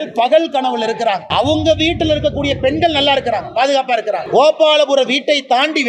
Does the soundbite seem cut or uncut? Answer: cut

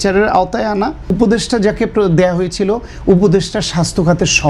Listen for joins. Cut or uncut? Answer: cut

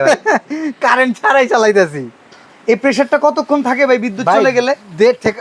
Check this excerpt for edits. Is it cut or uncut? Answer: cut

